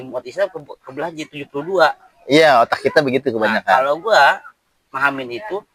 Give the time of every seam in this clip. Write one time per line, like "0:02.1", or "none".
none

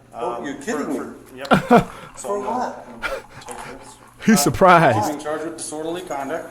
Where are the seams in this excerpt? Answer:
0:01.3

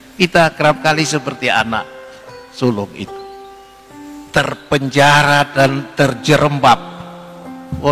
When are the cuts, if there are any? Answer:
0:03.1
0:04.3

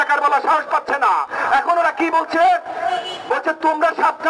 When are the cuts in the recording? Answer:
none

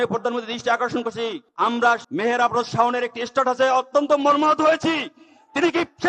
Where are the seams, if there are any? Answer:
0:01.7

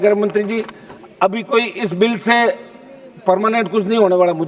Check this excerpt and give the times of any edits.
none

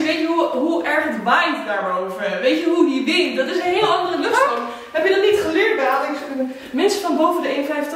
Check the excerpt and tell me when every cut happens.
none

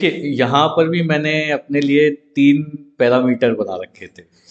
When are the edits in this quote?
none

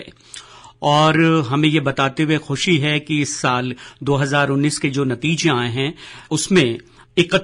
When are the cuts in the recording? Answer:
0:06.3

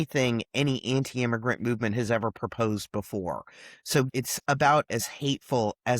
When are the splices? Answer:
0:04.1

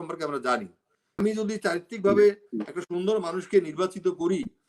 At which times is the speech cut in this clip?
0:01.2

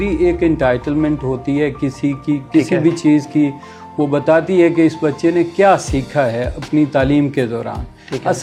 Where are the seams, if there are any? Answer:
none

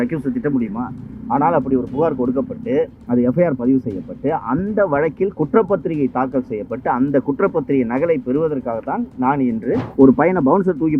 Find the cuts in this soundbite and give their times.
0:09.9

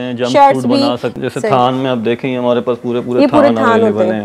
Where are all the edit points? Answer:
0:01.1

